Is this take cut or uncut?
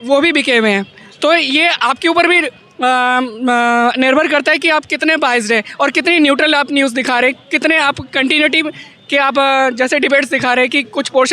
uncut